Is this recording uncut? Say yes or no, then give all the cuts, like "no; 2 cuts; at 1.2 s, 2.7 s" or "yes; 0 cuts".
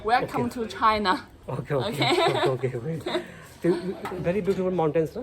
no; 1 cut; at 4.0 s